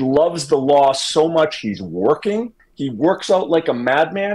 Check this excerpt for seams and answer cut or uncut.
uncut